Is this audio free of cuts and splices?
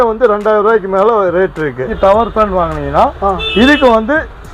no; 1 cut; at 1.8 s

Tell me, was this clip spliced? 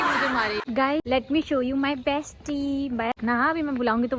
yes; 2 cuts; at 1.0 s, 3.2 s

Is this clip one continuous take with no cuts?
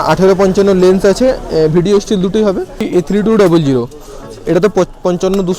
no; 1 cut; at 2.9 s

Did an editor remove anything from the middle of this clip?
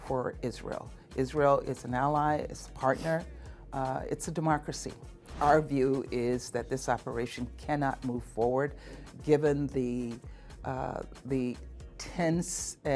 yes; 1 cut; at 5.3 s

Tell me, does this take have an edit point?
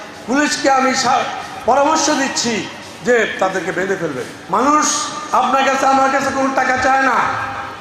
yes; 1 cut; at 4.3 s

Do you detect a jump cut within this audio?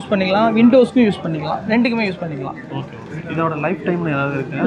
no; 0 cuts

